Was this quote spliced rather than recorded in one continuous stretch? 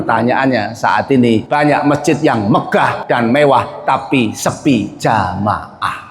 yes; 2 cuts; at 1.5 s, 3.0 s

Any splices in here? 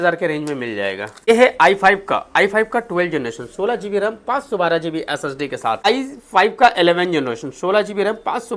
yes; 2 cuts; at 1.3 s, 5.9 s

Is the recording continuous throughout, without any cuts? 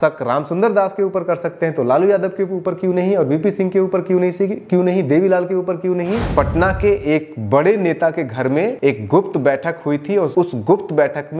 no; 3 cuts; at 6.3 s, 8.8 s, 10.3 s

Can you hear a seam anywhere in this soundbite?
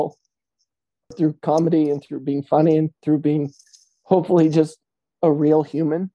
yes; 1 cut; at 1.1 s

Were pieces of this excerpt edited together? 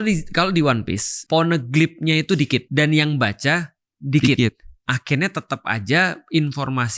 yes; 2 cuts; at 1.1 s, 2.7 s

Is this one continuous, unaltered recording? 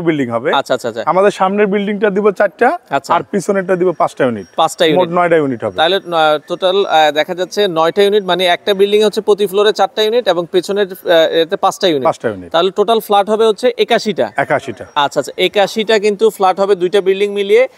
yes; 0 cuts

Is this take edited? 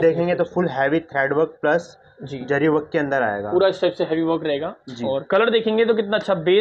no; 0 cuts

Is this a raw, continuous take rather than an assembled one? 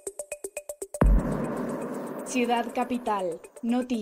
no; 1 cut; at 0.9 s

